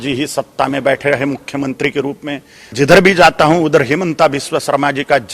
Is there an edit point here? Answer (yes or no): yes